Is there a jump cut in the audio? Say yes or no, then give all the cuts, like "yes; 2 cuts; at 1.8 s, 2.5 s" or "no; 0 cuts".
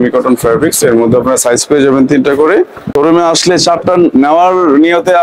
yes; 1 cut; at 2.8 s